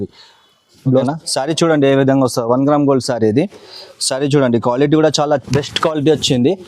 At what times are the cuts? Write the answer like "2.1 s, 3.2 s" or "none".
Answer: 1.0 s